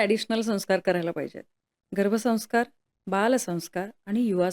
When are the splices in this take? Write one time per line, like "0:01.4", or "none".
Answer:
none